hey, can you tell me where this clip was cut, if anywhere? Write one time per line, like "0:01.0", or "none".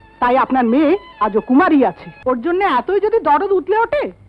0:02.1